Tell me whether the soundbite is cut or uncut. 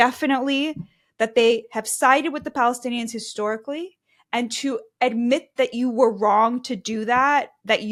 uncut